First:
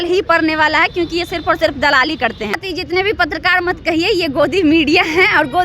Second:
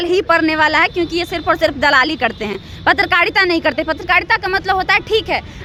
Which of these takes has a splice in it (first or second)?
first